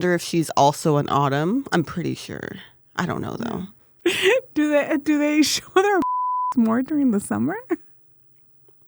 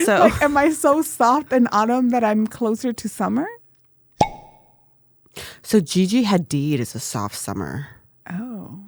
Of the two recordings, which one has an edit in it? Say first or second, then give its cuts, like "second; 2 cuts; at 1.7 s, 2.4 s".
first; 1 cut; at 3.8 s